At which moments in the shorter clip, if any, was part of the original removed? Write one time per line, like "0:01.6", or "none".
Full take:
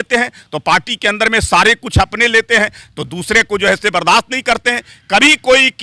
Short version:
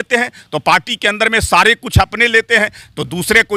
none

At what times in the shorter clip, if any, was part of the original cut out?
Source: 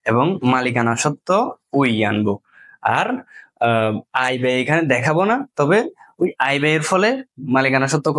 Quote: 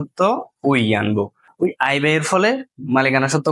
0:01.4

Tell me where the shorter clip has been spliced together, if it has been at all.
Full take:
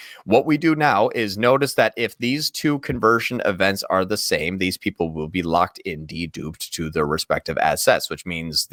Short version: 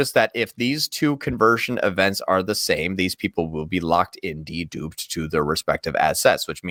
none

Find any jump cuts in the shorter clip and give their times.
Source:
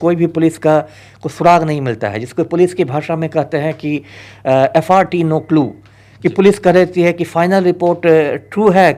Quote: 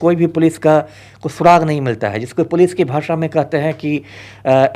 none

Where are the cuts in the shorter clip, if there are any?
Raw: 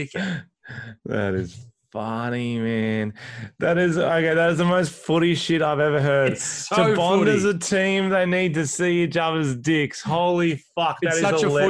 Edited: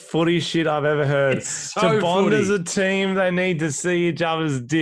none

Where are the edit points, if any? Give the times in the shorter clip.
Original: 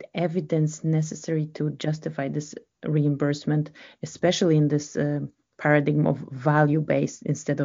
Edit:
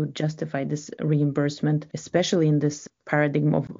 0:00.9
0:01.9
0:02.8

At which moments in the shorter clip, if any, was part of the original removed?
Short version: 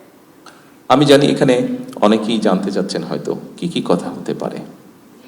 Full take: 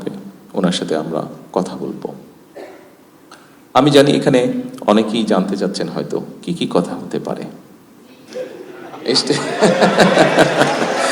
none

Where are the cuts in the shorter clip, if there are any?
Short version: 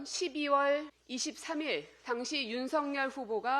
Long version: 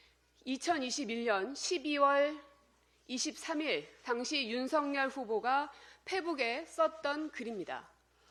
0:01.0

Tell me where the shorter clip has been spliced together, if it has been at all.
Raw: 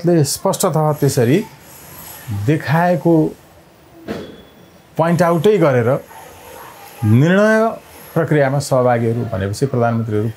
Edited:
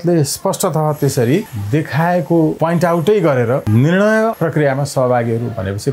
0:01.6
0:02.6
0:03.6
0:04.4

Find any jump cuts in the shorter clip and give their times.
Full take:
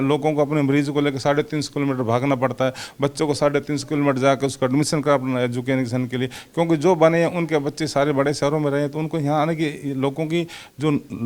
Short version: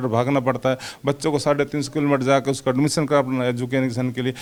none

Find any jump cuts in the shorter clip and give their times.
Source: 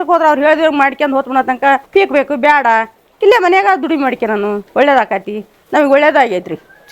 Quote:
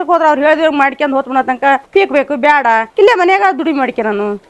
0:02.9

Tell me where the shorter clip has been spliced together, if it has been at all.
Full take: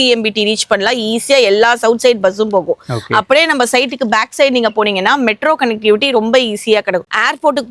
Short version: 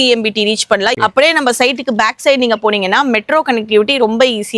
0:00.9

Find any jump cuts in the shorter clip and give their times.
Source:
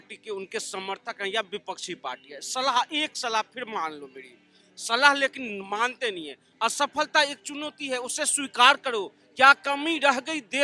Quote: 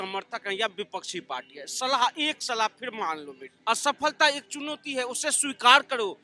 0:03.4

